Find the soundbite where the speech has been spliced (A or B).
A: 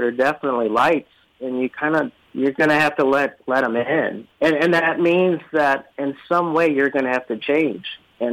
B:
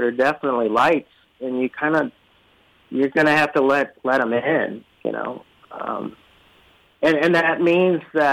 A